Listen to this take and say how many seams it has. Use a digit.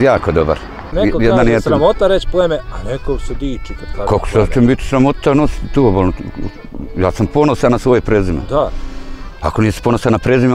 1